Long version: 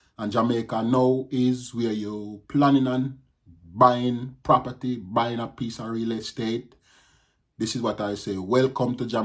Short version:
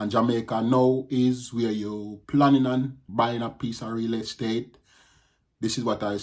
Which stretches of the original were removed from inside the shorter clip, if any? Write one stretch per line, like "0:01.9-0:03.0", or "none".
0:03.2-0:05.0